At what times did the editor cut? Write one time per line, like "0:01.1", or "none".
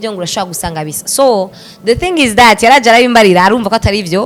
none